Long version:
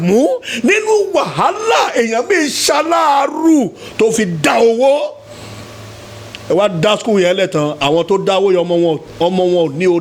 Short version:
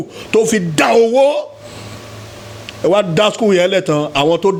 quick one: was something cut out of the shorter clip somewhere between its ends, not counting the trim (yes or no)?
no